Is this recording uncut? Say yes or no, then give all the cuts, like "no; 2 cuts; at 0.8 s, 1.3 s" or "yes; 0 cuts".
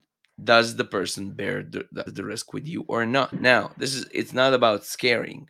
no; 2 cuts; at 2.1 s, 3.4 s